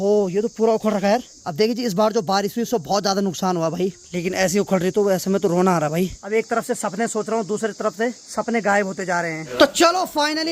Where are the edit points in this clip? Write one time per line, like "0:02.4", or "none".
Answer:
0:01.3
0:03.9
0:06.2
0:08.2
0:09.5